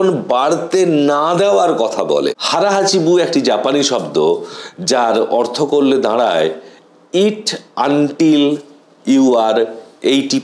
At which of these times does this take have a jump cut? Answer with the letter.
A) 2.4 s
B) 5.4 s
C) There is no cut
A